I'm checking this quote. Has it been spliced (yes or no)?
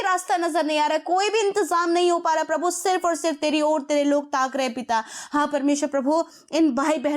no